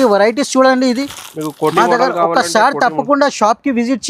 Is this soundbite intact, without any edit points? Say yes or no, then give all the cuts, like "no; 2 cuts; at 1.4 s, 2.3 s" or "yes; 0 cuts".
yes; 0 cuts